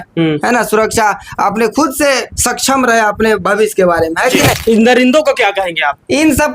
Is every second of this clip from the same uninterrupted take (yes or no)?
no